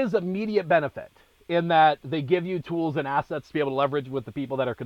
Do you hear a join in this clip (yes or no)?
no